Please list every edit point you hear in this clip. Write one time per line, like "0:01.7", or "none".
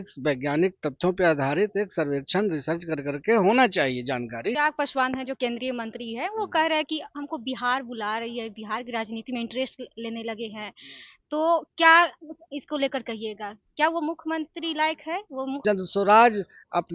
0:04.6
0:15.6